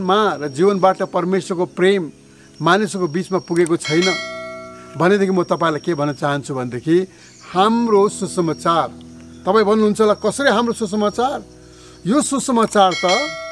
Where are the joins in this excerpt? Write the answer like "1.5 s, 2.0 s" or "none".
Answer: 7.3 s